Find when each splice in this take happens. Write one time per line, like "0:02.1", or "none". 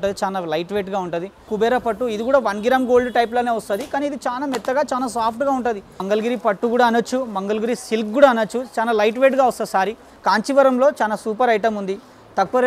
0:01.5
0:06.0
0:10.1